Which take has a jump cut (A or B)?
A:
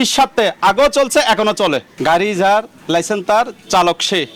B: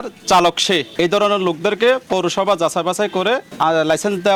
A